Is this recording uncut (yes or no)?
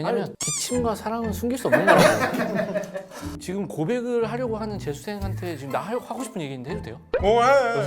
no